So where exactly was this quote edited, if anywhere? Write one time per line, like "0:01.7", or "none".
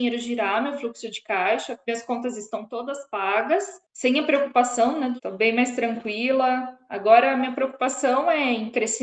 0:03.8
0:05.2